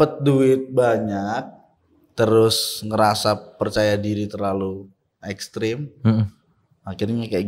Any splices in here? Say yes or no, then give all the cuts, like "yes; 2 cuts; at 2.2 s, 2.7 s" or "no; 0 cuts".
no; 0 cuts